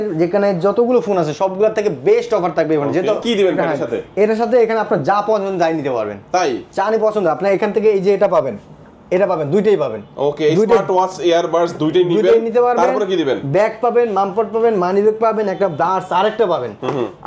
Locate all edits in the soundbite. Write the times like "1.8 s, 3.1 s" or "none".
3.2 s